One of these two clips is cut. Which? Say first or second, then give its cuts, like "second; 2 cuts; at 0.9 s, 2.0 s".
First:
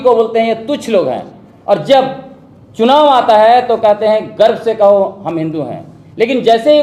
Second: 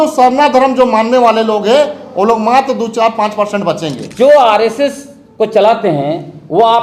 second; 1 cut; at 4.0 s